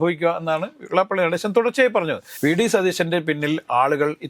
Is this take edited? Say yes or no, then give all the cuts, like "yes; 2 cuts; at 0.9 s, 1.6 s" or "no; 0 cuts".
yes; 1 cut; at 2.3 s